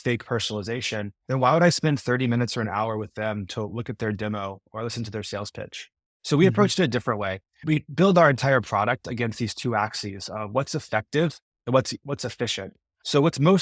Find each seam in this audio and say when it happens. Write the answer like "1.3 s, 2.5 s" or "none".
1.2 s

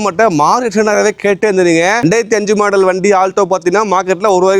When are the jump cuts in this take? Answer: 2.0 s

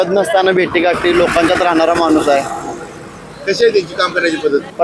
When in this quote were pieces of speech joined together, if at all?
none

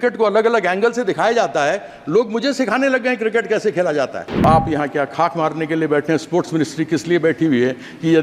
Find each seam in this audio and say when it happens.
4.4 s

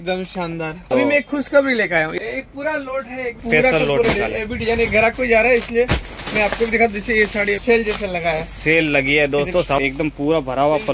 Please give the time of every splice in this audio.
0.8 s, 2.1 s, 3.4 s, 7.6 s, 9.8 s

